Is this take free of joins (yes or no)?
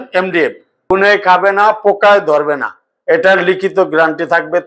no